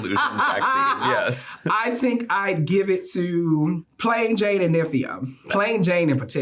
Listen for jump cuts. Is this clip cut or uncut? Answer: cut